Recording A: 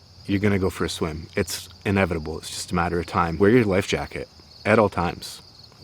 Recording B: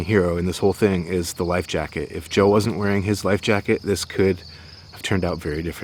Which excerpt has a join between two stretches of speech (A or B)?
A